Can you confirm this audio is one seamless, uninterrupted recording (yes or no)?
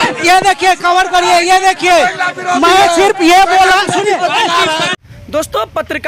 yes